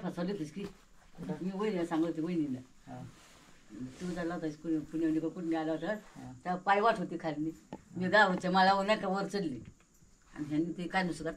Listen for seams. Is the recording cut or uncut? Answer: uncut